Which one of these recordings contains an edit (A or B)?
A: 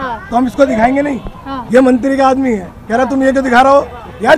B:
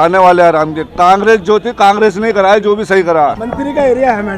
B